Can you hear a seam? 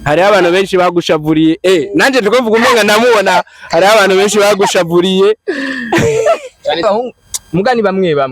yes; 1 cut; at 6.8 s

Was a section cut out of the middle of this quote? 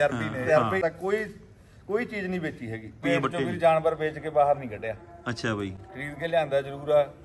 yes; 2 cuts; at 0.8 s, 3.0 s

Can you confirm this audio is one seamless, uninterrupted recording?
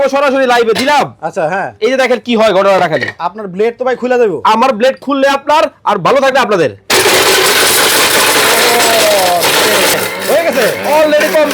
no; 1 cut; at 10.0 s

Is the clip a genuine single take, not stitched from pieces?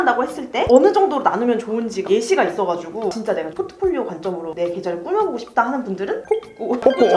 yes; 0 cuts

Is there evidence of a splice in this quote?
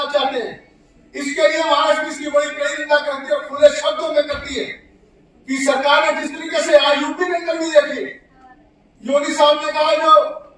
no; 0 cuts

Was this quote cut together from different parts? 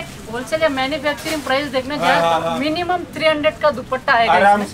no; 0 cuts

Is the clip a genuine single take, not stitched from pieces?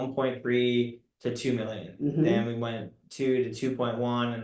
yes; 0 cuts

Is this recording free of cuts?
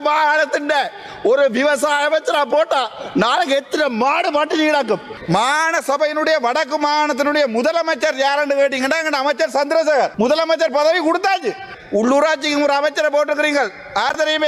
no; 3 cuts; at 5.1 s, 10.1 s, 11.7 s

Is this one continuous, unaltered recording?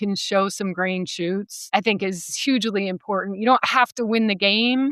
yes; 0 cuts

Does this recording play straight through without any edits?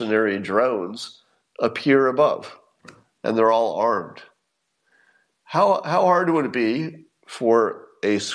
yes; 0 cuts

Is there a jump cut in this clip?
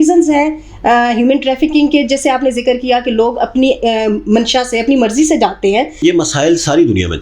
yes; 1 cut; at 6.0 s

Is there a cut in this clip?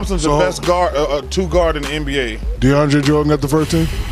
no; 0 cuts

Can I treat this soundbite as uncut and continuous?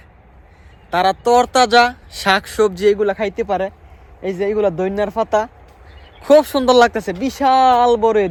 yes; 0 cuts

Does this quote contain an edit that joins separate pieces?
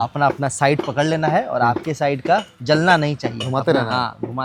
no; 0 cuts

